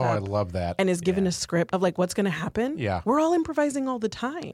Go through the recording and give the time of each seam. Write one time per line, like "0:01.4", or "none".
0:01.7